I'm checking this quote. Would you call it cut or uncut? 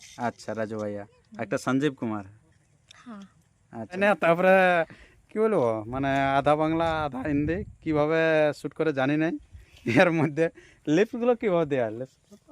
cut